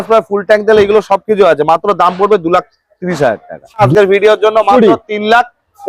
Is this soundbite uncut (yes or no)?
no